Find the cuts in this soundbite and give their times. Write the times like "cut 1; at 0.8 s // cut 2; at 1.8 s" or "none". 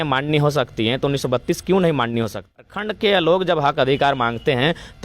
cut 1; at 2.7 s